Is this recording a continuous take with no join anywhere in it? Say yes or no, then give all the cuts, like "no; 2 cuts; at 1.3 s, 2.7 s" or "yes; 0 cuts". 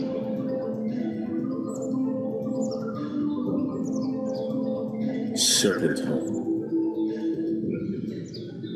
yes; 0 cuts